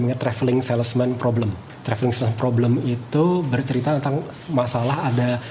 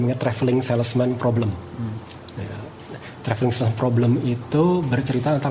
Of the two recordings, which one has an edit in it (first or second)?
first